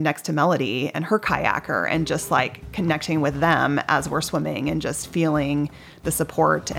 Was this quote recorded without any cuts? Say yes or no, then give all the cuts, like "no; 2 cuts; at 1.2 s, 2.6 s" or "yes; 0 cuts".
yes; 0 cuts